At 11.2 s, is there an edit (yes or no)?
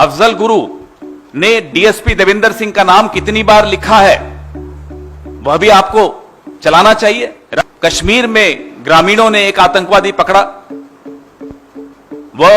no